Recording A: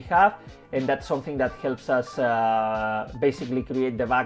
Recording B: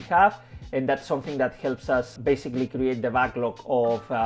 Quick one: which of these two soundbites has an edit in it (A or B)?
B